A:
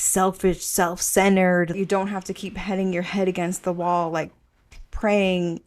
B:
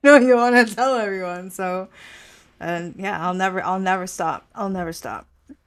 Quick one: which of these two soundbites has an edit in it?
A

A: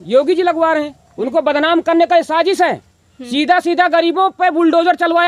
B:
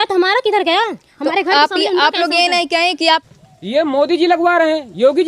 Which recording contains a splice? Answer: B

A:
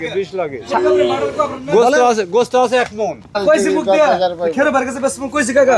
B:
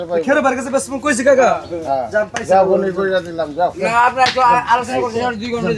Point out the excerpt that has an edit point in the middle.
A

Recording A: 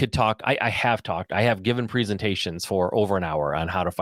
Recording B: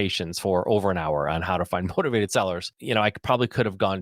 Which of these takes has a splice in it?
B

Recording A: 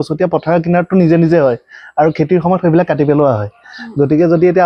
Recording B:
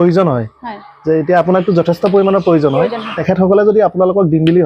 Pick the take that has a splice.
B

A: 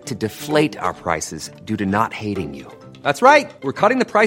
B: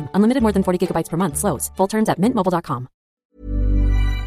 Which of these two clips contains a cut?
B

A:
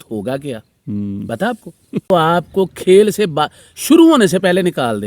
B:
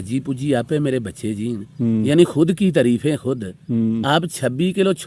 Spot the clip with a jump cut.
A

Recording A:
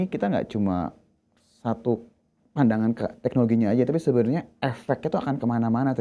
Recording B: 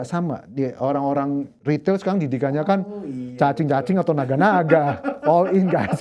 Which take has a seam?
B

